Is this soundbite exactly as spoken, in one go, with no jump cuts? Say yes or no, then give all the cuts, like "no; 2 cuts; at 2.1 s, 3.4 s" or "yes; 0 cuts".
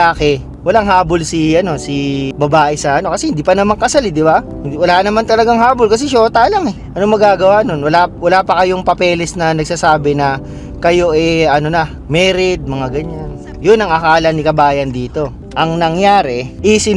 no; 2 cuts; at 4.6 s, 12.0 s